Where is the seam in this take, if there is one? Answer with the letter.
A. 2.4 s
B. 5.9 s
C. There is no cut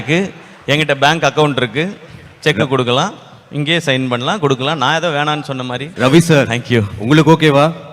B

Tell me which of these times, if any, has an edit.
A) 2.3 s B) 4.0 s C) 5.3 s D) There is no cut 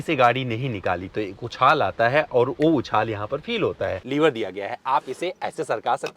B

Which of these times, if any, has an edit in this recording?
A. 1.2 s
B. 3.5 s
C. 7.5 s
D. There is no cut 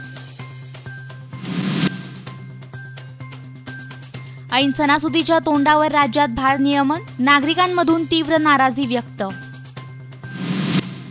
A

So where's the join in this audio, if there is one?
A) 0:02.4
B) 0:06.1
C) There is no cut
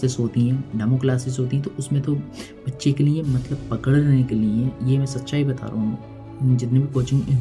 C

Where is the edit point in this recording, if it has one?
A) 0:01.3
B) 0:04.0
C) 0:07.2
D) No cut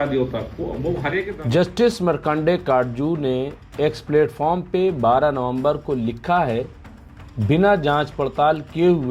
A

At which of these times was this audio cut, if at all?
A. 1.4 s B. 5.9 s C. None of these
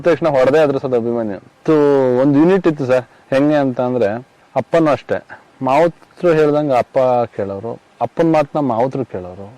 A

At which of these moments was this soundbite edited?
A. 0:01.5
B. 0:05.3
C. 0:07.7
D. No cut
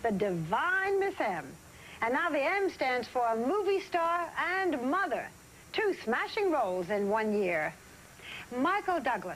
C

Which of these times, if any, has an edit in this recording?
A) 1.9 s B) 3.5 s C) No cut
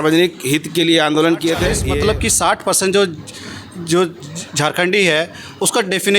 A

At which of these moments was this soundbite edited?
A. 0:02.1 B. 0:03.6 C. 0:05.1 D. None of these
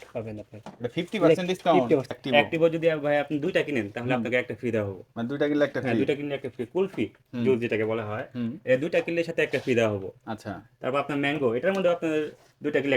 A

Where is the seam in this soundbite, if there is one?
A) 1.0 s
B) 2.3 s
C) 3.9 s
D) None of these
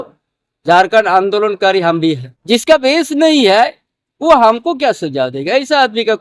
B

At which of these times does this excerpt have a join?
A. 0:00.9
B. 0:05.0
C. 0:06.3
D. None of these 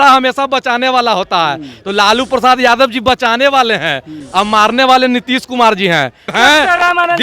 C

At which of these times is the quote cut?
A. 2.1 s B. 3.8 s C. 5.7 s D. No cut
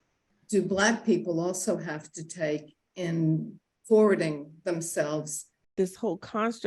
C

